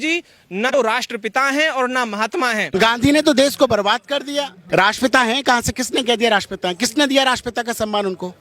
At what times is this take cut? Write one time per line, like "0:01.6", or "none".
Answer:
0:00.7
0:02.7
0:04.6